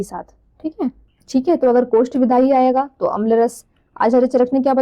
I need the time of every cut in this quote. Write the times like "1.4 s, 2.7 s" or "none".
1.1 s